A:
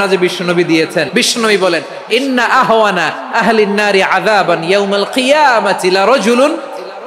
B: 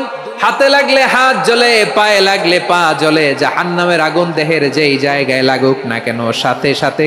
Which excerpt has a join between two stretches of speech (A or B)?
A